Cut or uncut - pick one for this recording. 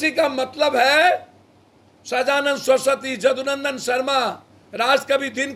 uncut